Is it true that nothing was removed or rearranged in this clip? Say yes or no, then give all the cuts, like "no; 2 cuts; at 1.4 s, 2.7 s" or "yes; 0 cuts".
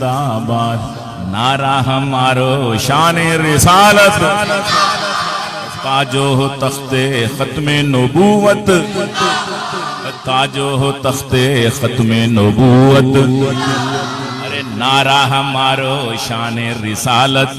yes; 0 cuts